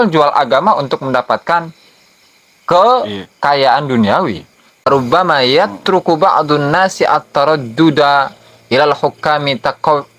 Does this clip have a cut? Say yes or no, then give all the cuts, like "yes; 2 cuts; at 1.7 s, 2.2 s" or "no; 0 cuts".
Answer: yes; 1 cut; at 4.9 s